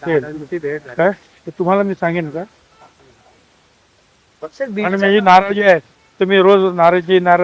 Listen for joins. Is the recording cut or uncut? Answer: uncut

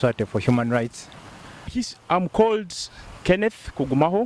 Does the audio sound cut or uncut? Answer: cut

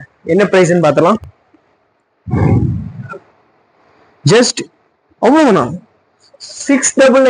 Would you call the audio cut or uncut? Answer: uncut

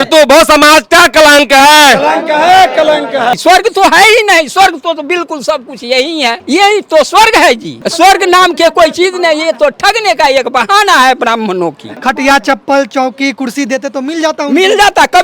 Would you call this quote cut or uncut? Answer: cut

